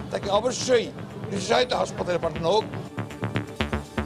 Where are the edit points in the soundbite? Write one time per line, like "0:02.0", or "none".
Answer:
0:03.1